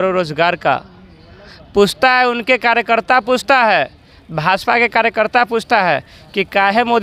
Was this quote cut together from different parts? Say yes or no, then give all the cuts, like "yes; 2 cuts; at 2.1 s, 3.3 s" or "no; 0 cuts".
no; 0 cuts